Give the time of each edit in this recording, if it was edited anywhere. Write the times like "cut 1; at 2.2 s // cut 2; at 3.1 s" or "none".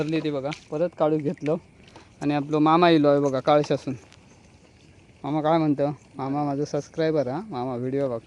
none